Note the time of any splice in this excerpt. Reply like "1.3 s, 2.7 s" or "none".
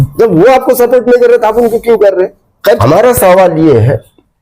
2.8 s